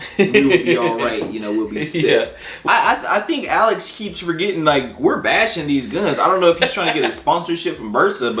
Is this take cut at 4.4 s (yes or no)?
no